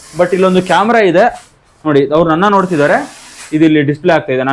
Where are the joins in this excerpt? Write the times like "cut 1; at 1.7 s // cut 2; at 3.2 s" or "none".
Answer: cut 1; at 1.5 s